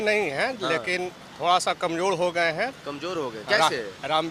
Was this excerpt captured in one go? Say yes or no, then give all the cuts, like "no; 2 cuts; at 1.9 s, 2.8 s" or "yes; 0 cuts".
yes; 0 cuts